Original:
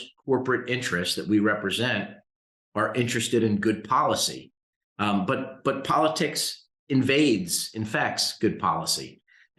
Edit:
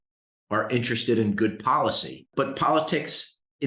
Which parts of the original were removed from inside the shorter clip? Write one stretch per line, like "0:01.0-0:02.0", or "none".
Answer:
0:04.5-0:05.5